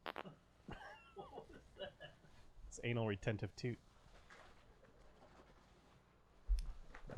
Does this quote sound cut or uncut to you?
cut